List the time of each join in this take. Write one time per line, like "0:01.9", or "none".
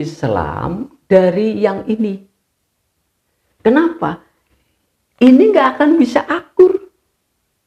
none